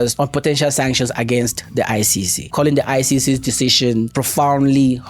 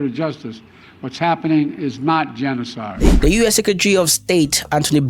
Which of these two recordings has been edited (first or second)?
second